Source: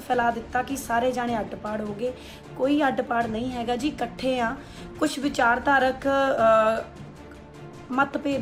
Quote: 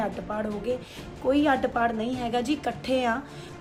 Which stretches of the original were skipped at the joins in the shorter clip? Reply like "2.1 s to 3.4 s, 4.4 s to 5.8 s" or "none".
none

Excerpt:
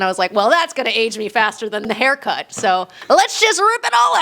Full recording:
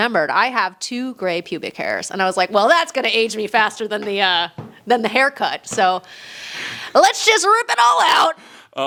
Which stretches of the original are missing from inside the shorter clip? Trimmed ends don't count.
4.0 s to 5.0 s, 6.1 s to 6.8 s

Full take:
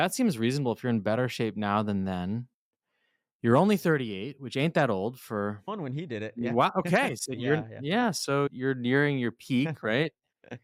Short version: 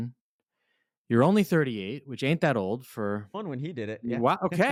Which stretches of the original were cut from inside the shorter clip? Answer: none

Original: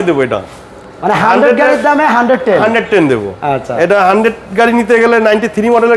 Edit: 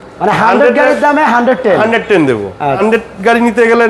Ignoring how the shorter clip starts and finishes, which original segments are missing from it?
3.6 s to 4.1 s

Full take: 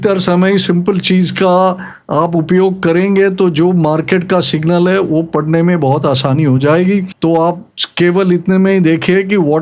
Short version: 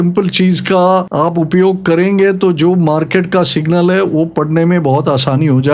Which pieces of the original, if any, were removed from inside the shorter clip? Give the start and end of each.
1.8 s to 2.1 s

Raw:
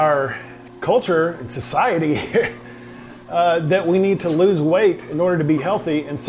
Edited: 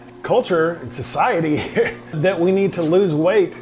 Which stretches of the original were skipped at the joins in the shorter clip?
2.7 s to 3.6 s

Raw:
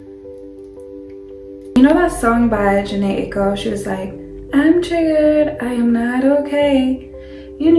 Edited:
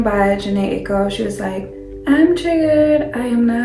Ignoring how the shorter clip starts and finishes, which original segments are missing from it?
none

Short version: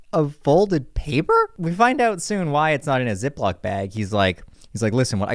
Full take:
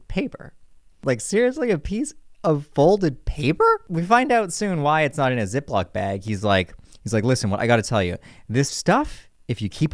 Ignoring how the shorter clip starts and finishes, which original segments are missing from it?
none

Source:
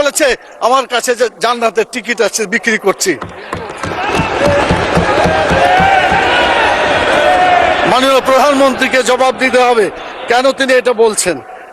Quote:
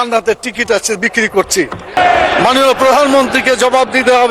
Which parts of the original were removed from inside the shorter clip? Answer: 3.5 s to 7.4 s

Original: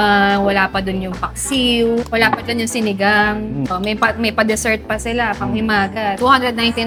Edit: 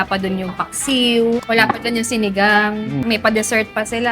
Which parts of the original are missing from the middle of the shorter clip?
3.7 s to 4.2 s

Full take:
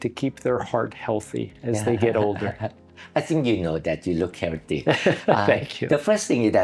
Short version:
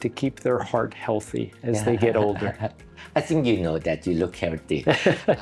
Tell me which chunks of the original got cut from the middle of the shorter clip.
none

